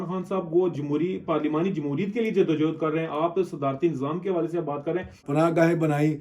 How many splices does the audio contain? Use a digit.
1